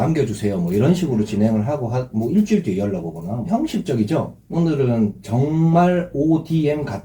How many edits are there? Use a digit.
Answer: 2